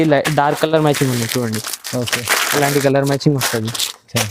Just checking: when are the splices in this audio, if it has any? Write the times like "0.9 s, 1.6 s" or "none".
none